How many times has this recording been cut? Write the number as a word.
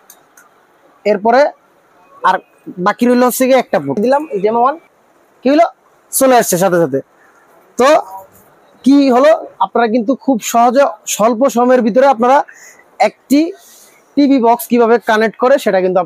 one